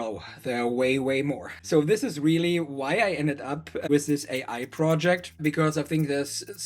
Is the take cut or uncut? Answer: cut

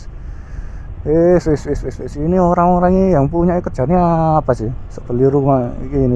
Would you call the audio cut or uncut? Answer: uncut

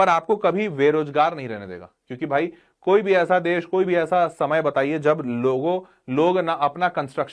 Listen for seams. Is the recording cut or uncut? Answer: uncut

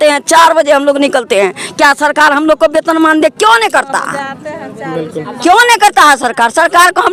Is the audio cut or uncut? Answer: uncut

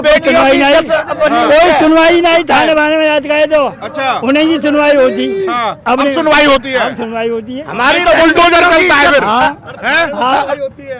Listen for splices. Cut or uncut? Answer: uncut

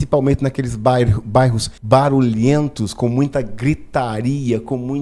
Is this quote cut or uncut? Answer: cut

